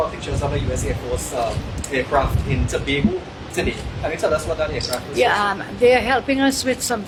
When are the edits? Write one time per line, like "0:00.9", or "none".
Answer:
none